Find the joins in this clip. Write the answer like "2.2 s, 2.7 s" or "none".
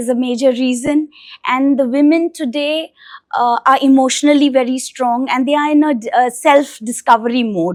none